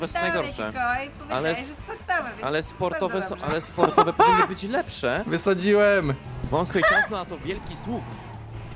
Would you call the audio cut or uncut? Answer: cut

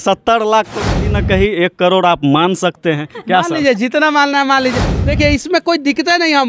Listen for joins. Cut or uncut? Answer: uncut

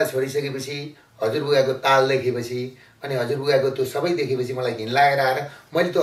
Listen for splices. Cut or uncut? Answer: uncut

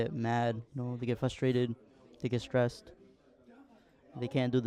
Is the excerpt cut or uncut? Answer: uncut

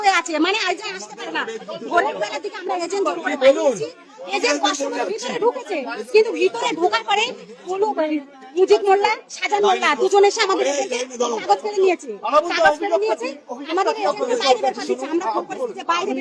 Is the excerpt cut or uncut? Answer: uncut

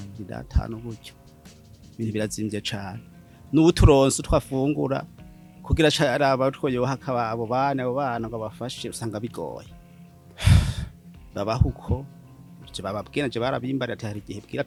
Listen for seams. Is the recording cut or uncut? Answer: uncut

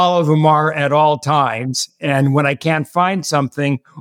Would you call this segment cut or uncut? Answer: uncut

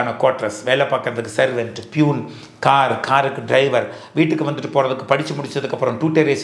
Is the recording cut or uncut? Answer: uncut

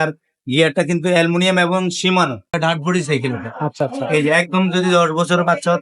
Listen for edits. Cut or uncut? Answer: cut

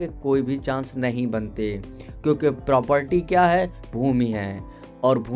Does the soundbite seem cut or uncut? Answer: uncut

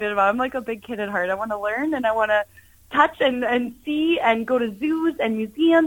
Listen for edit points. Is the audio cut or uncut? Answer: uncut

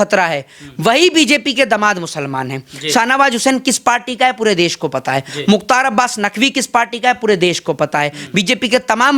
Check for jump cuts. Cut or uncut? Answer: uncut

